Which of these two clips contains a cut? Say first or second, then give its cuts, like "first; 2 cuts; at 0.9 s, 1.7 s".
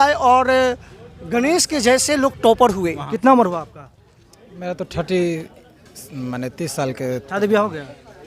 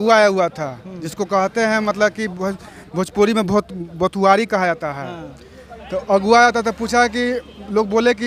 first; 1 cut; at 2.9 s